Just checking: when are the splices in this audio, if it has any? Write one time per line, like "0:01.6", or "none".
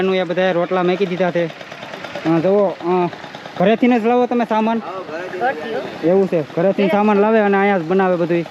none